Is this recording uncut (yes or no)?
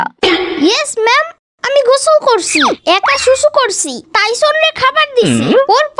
yes